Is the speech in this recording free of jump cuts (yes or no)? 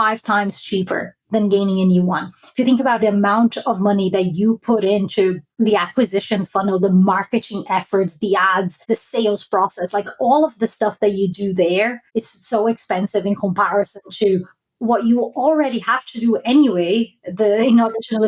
no